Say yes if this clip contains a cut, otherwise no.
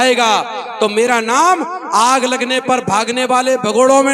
no